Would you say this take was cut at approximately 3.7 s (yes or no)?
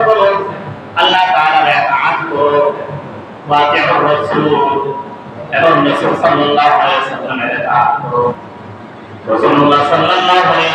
no